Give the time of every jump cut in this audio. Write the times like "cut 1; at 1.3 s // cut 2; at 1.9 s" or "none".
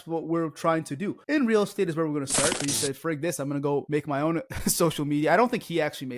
cut 1; at 1.2 s // cut 2; at 2.6 s // cut 3; at 4.1 s